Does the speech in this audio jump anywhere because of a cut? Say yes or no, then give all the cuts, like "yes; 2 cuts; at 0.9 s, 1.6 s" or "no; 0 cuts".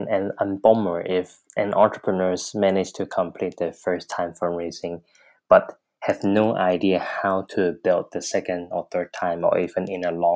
no; 0 cuts